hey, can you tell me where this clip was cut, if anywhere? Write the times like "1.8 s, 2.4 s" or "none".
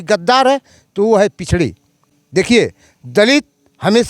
none